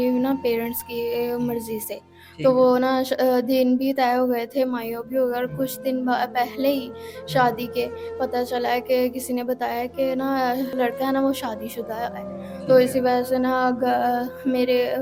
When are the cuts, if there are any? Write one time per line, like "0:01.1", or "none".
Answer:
none

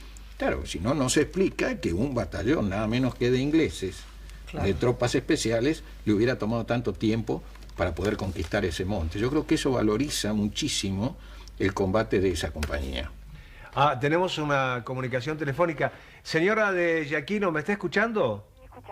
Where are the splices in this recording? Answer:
none

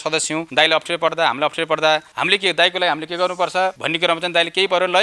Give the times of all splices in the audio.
none

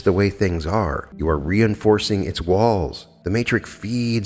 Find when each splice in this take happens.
0:01.1
0:03.1

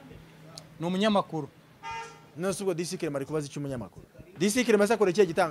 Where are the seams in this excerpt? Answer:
0:04.3

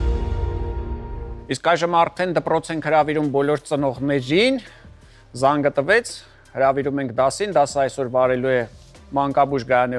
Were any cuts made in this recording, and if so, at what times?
none

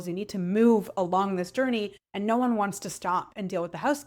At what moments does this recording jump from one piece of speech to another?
none

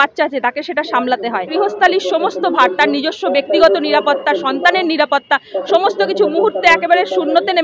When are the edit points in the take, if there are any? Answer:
0:01.5

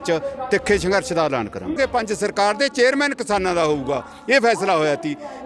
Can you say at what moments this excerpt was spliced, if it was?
0:01.8

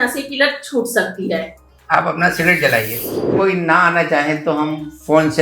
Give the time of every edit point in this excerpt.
0:03.3

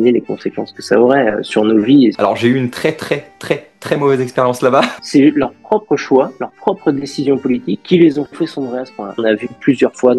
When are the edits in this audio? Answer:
0:02.2
0:05.0
0:09.2

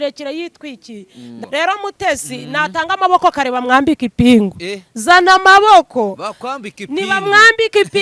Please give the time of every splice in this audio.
0:01.3

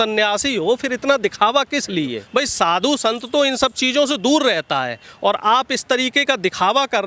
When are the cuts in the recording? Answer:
0:02.2

